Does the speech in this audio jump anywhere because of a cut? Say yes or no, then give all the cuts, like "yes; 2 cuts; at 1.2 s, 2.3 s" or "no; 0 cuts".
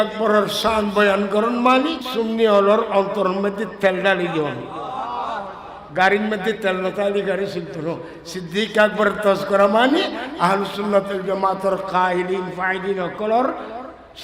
yes; 1 cut; at 2.0 s